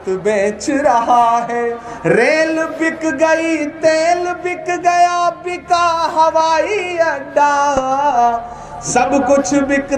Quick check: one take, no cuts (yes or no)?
no